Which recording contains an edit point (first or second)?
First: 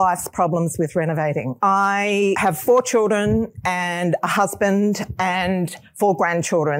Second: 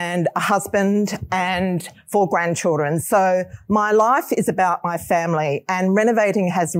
first